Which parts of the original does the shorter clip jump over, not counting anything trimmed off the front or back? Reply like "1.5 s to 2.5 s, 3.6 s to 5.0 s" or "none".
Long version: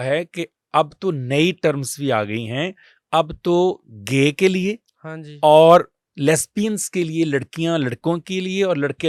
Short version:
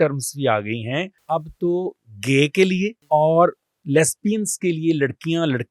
2.8 s to 3.0 s, 4.8 s to 5.3 s